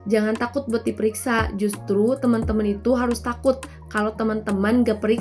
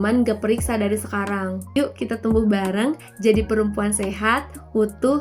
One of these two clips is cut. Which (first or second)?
second